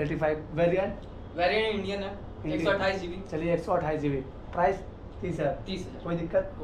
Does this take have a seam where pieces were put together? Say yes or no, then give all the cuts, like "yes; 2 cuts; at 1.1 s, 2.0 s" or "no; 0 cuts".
no; 0 cuts